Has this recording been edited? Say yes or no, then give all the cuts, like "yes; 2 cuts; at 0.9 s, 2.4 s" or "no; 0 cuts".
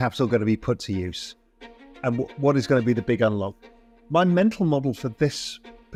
no; 0 cuts